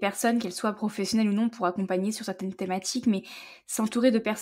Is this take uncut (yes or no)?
yes